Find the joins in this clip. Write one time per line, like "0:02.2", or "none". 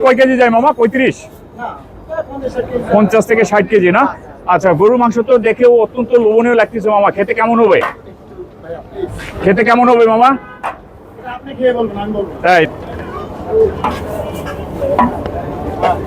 0:12.7